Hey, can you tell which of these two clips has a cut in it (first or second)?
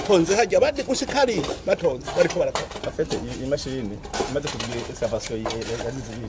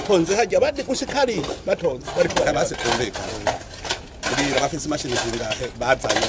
second